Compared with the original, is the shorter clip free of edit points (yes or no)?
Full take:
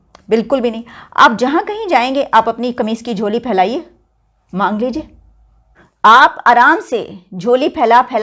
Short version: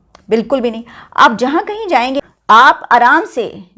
no